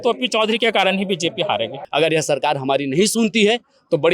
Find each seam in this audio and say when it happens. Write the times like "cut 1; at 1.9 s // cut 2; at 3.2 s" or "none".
cut 1; at 1.8 s